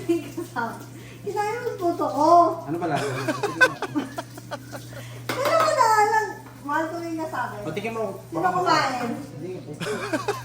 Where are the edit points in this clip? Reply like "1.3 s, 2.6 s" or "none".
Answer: 3.0 s, 5.2 s